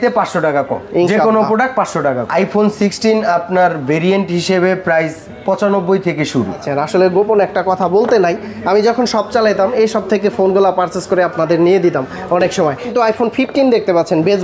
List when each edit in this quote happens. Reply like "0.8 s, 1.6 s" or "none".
2.2 s, 6.6 s, 12.9 s